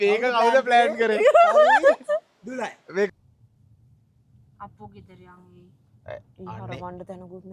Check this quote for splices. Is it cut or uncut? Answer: cut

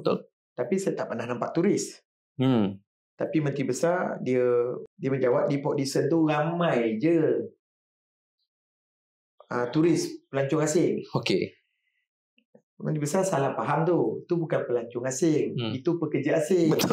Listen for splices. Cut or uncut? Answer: cut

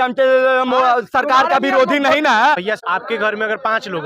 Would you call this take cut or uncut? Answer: cut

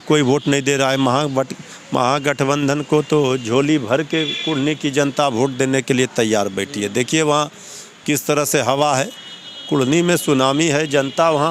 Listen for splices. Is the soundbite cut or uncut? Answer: uncut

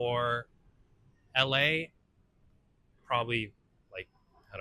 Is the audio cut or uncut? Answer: uncut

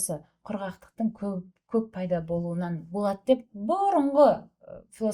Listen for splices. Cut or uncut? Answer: uncut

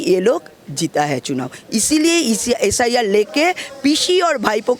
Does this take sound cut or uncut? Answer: uncut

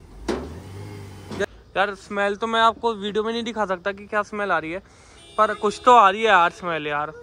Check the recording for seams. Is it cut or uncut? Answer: cut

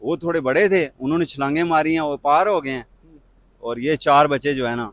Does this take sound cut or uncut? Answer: uncut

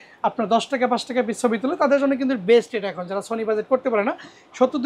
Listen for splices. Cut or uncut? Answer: uncut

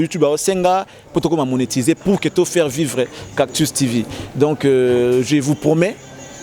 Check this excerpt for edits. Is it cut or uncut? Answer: uncut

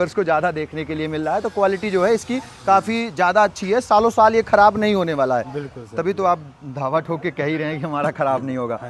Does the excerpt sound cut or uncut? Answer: uncut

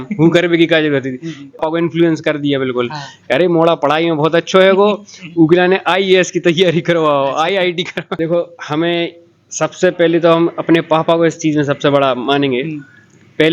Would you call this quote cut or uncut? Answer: cut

